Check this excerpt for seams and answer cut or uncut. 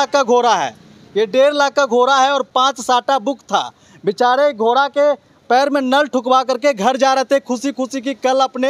uncut